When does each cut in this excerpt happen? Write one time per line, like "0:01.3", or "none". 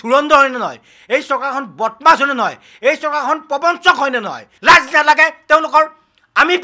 0:04.5